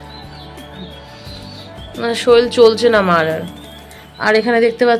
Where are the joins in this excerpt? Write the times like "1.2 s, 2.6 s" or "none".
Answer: none